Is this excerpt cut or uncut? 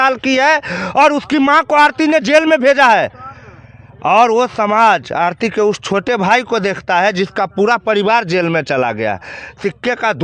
uncut